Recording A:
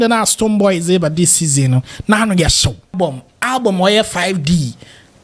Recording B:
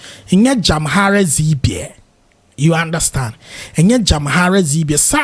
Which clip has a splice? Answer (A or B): A